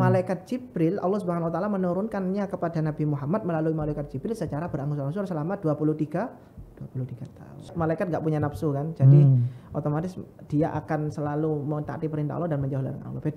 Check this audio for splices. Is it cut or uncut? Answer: cut